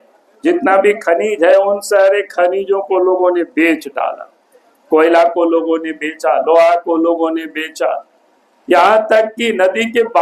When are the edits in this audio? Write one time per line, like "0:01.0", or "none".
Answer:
none